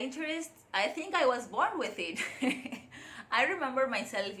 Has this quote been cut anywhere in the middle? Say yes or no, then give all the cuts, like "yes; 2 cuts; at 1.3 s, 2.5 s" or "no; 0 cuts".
no; 0 cuts